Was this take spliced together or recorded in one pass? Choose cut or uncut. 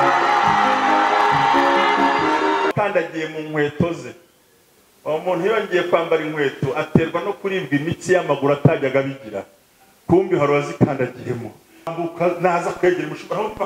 cut